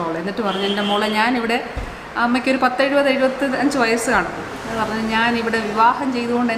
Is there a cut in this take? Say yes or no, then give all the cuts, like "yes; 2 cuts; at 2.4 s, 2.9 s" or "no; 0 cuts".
no; 0 cuts